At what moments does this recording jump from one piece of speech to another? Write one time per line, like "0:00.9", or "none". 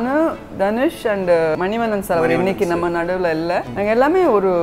0:01.6
0:03.7